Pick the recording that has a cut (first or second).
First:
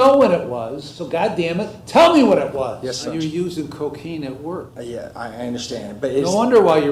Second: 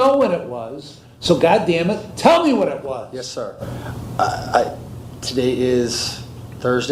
first